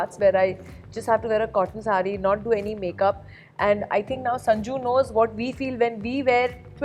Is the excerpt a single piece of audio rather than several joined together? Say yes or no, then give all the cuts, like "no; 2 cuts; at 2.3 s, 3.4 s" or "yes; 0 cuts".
yes; 0 cuts